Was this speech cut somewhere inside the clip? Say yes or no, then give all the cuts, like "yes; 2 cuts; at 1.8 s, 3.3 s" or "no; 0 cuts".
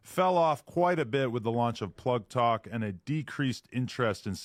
no; 0 cuts